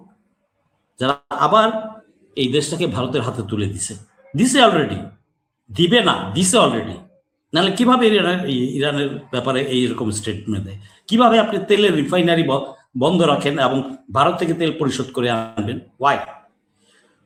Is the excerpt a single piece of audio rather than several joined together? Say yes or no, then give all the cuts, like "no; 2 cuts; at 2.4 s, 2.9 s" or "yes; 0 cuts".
yes; 0 cuts